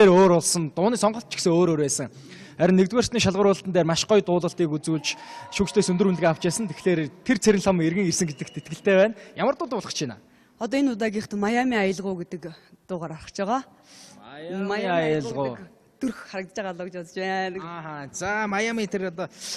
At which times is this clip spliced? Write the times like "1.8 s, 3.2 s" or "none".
7.5 s